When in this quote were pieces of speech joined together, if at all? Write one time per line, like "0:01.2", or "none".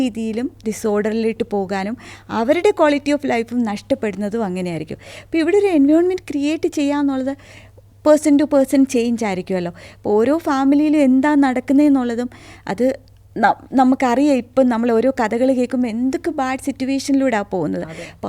none